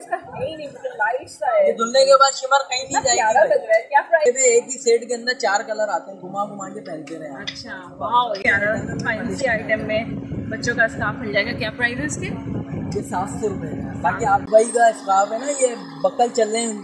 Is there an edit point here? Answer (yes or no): yes